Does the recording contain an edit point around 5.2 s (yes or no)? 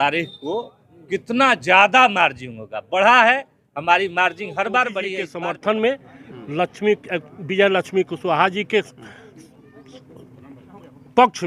yes